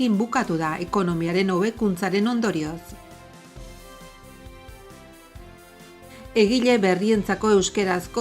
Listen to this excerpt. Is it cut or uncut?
cut